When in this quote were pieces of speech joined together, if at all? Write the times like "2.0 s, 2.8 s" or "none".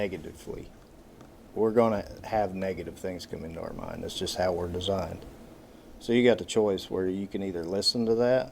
1.4 s